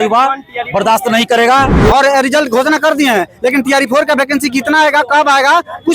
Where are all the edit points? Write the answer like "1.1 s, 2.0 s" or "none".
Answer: 1.7 s